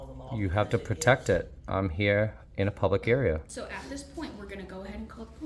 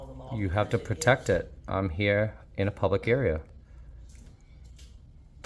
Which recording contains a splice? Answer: first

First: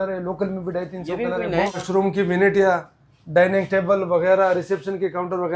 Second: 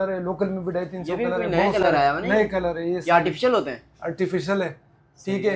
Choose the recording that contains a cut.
first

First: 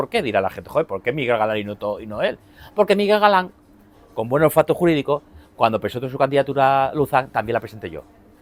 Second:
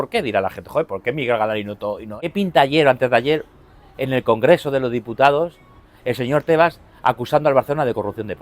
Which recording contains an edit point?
second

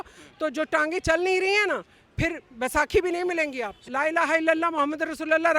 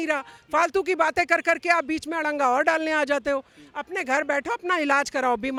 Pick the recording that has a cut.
first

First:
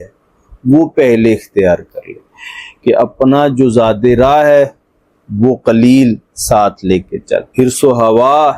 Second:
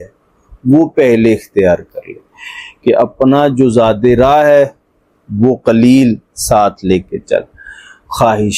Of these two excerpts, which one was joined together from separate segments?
first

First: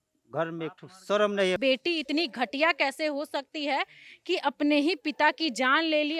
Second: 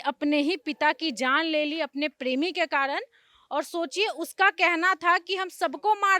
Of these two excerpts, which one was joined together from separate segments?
first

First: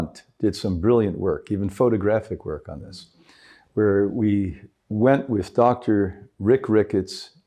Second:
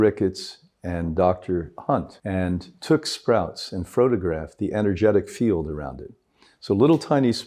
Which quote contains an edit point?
second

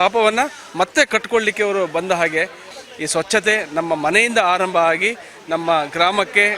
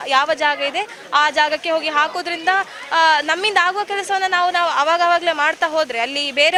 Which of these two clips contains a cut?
first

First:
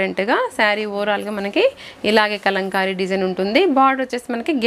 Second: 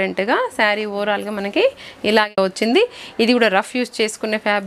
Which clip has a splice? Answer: second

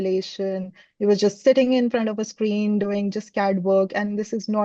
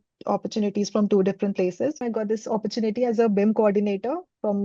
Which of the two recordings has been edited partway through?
second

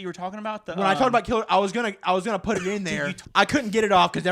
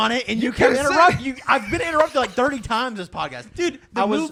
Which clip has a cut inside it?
first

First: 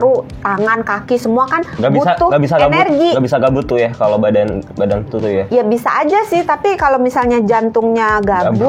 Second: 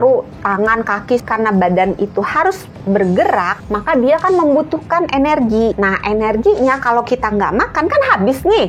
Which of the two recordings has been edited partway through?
second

